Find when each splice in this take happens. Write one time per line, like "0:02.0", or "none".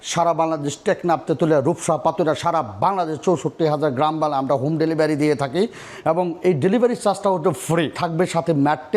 0:07.9